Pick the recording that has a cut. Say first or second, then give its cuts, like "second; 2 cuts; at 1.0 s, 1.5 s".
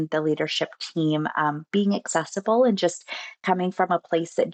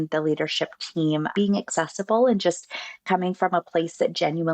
second; 1 cut; at 1.3 s